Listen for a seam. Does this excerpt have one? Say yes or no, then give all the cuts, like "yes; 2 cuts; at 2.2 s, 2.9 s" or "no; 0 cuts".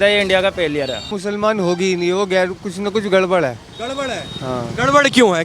yes; 1 cut; at 1.1 s